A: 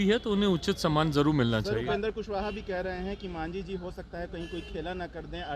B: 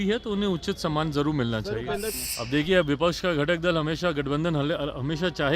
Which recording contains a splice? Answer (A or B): B